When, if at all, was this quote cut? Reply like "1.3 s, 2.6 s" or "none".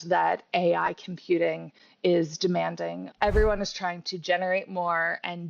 3.0 s